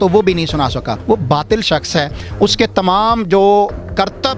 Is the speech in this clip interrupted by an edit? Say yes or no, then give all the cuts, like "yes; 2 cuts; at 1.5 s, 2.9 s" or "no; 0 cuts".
yes; 1 cut; at 0.9 s